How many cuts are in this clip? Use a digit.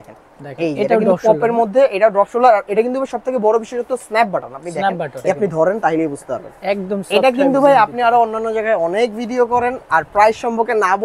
1